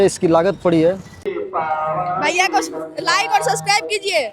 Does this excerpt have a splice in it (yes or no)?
yes